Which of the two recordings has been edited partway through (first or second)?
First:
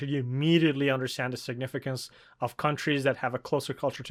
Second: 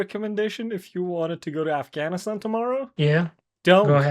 second